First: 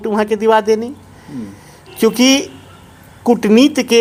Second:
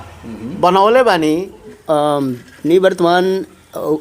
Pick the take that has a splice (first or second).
second